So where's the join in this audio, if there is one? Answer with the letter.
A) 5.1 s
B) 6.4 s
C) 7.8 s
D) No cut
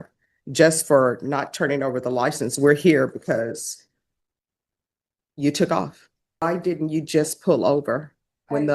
B